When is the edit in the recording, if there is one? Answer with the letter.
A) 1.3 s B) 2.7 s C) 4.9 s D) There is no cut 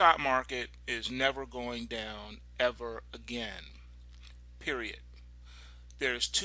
A